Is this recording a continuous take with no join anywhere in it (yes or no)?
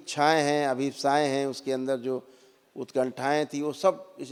yes